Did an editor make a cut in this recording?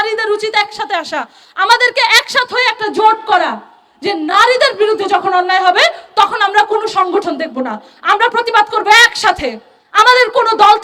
no; 0 cuts

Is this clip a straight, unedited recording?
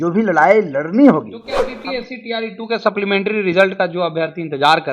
no; 1 cut; at 1.7 s

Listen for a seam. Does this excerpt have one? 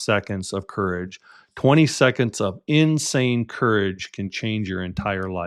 no; 0 cuts

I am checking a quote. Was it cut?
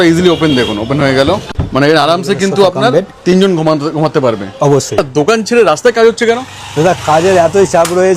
yes; 2 cuts; at 1.5 s, 5.1 s

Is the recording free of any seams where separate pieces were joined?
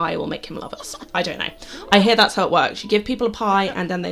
yes; 0 cuts

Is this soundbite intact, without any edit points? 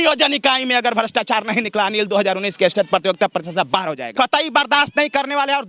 no; 1 cut; at 4.1 s

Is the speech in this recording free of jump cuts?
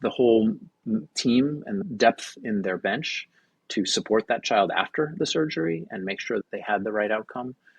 no; 2 cuts; at 1.8 s, 6.4 s

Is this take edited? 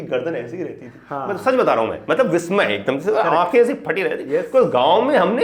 no; 0 cuts

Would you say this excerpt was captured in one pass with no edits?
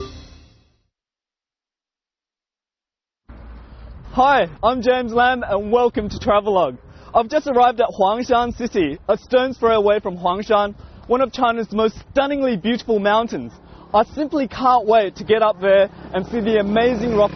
no; 1 cut; at 15.2 s

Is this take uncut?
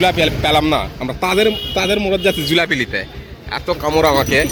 yes; 0 cuts

